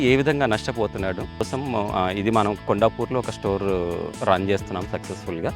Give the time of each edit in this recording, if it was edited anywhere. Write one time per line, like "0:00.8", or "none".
0:01.5